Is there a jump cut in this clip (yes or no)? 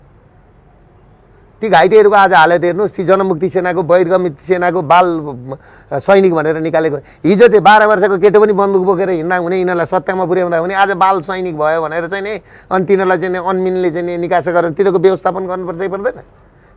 no